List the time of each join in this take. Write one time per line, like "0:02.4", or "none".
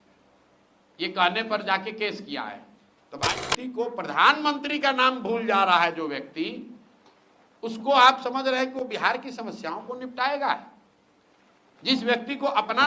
0:03.3